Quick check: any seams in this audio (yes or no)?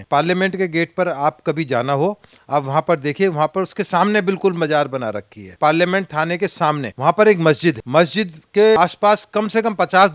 yes